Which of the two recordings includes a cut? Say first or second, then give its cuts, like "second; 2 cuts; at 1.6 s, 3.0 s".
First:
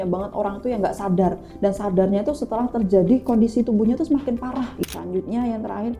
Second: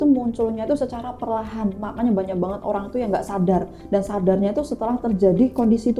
first; 1 cut; at 4.8 s